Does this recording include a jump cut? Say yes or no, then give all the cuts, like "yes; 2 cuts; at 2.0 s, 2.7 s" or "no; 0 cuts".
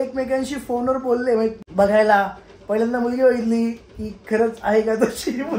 yes; 1 cut; at 1.6 s